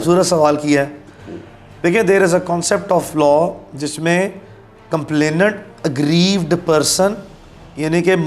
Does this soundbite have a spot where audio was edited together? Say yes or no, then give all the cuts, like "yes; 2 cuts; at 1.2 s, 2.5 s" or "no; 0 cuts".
no; 0 cuts